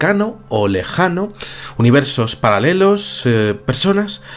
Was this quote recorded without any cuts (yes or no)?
yes